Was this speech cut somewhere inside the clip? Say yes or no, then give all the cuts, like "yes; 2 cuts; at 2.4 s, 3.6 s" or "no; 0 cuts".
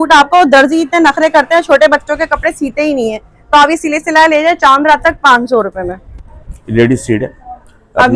no; 0 cuts